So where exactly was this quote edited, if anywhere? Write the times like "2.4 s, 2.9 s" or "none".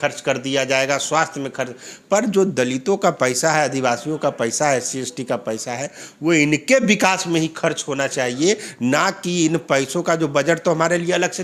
none